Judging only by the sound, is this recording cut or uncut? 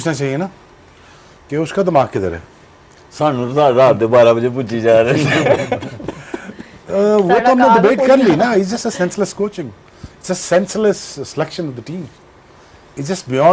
uncut